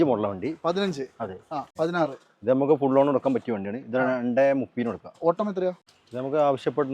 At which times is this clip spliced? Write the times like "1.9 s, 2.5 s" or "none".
1.7 s, 5.9 s